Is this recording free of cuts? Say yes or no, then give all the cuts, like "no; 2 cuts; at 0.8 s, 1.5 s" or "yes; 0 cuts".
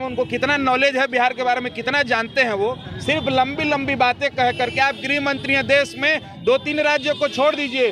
yes; 0 cuts